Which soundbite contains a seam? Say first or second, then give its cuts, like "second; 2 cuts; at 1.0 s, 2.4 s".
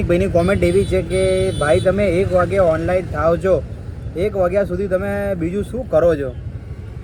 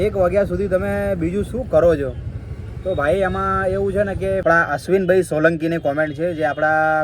second; 1 cut; at 4.4 s